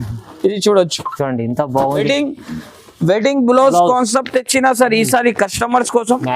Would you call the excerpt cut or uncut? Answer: cut